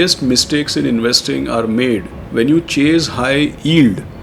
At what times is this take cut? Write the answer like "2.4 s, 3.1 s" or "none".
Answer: 2.2 s